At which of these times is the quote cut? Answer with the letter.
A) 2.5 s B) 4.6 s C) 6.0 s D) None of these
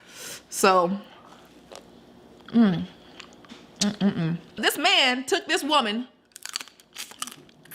B